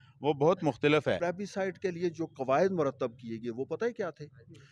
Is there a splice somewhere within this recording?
yes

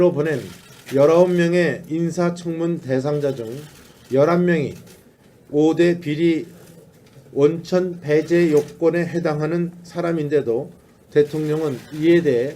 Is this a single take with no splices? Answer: no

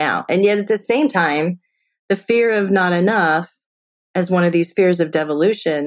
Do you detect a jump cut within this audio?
no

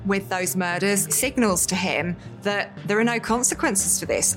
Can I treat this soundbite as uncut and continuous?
no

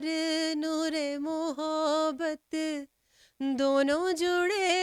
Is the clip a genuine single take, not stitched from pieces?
yes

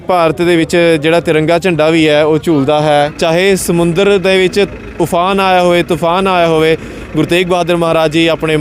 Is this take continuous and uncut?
no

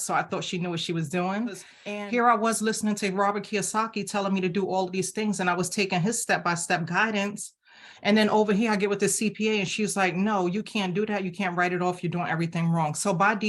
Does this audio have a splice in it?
yes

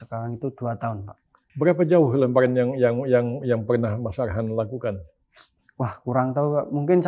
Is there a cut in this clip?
yes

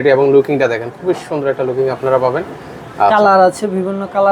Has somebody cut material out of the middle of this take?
no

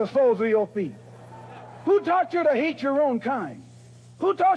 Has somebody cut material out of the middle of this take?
no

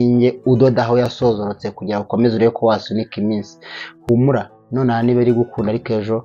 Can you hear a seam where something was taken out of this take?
yes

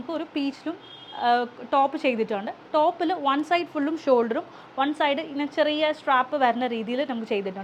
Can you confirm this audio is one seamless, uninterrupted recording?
yes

